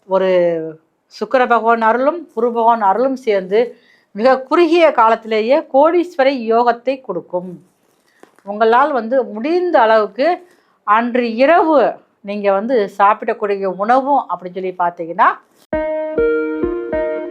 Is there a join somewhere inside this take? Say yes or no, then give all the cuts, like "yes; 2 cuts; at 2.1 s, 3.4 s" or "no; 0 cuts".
yes; 1 cut; at 15.6 s